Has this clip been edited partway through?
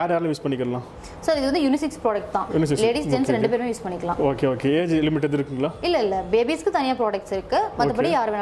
no; 0 cuts

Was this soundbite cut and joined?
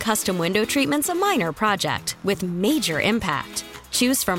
no; 0 cuts

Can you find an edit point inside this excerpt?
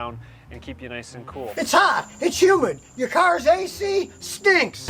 yes; 1 cut; at 1.5 s

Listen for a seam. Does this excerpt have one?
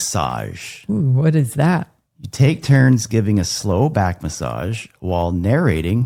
no; 0 cuts

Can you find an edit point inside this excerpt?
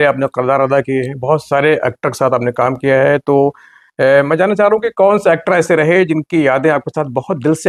no; 0 cuts

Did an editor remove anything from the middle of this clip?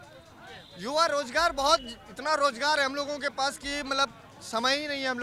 no; 0 cuts

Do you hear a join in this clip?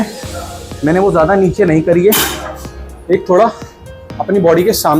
no; 0 cuts

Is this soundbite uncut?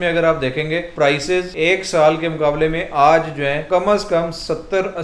no; 3 cuts; at 0.9 s, 1.5 s, 3.6 s

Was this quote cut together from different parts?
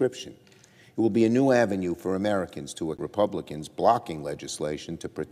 no; 0 cuts

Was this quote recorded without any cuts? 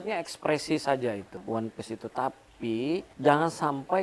no; 2 cuts; at 1.4 s, 3.1 s

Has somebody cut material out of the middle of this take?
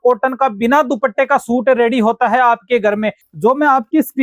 yes; 1 cut; at 3.2 s

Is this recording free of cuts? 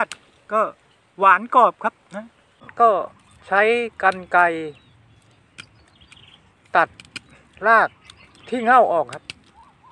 no; 1 cut; at 2.6 s

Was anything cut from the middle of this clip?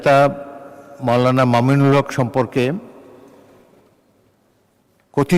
no; 0 cuts

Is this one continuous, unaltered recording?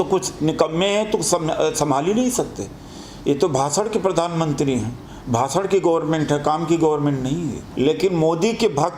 no; 1 cut; at 7.6 s

